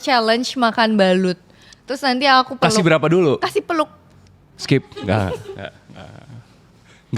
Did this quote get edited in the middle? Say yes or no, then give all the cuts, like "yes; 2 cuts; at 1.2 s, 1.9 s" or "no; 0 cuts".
no; 0 cuts